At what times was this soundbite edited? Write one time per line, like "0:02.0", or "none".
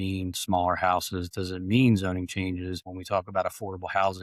0:02.8